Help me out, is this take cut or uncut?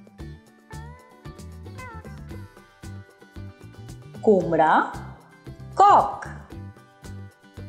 cut